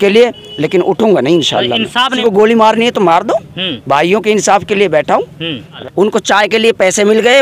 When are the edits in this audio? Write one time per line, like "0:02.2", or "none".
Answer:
0:02.1
0:05.7